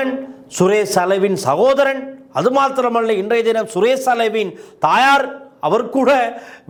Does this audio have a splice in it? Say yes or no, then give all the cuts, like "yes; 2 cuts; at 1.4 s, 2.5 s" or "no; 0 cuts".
no; 0 cuts